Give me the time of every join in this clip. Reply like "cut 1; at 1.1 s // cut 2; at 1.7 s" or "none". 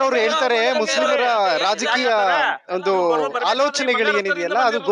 none